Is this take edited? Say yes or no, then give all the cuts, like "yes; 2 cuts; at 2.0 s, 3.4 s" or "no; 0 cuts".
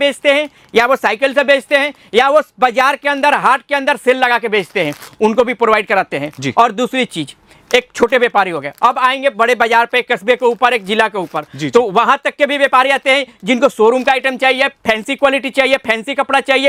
no; 0 cuts